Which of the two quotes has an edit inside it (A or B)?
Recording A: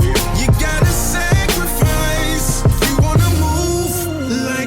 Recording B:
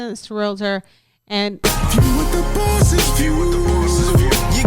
B